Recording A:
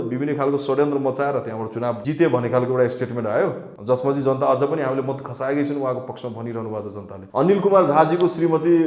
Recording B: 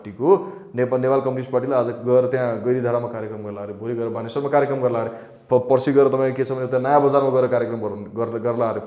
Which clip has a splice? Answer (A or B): A